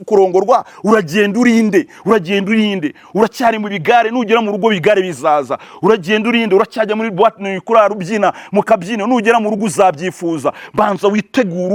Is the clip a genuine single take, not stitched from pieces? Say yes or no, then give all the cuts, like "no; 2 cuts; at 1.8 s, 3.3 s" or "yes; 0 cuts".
yes; 0 cuts